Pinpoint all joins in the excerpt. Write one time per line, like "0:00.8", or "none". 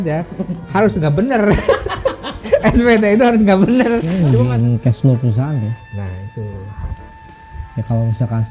0:04.1